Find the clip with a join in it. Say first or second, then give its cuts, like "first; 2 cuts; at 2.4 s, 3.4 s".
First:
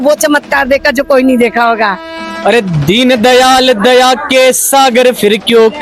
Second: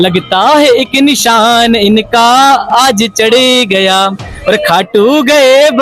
first; 1 cut; at 2.1 s